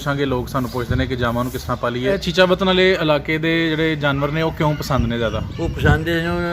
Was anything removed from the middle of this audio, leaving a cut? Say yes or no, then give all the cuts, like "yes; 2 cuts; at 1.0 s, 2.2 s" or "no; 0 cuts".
yes; 1 cut; at 2.2 s